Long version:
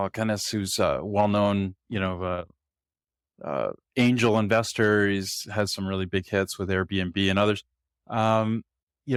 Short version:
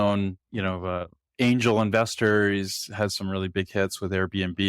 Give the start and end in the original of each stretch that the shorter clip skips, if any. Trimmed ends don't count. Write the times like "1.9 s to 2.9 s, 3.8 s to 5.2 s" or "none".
2.6 s to 3.8 s